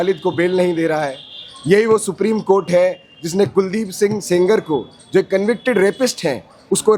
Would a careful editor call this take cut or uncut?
uncut